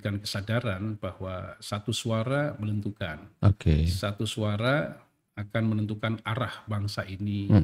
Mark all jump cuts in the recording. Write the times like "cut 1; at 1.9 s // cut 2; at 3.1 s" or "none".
none